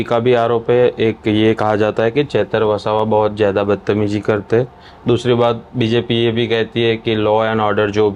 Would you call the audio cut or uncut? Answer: uncut